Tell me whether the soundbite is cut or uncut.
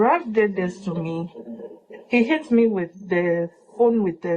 uncut